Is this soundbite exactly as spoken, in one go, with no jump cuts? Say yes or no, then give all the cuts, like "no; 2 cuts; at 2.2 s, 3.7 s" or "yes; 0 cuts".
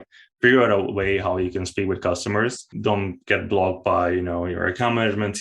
no; 1 cut; at 2.7 s